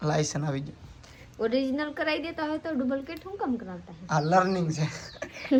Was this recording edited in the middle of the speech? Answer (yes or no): no